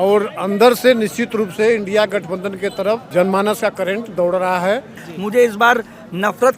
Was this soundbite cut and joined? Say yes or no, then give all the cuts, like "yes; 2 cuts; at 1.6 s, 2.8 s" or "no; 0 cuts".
yes; 2 cuts; at 3.0 s, 5.1 s